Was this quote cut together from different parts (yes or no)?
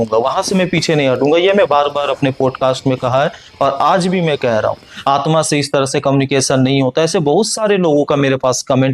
yes